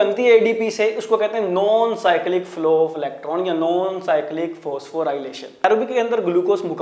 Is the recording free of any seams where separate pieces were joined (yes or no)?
no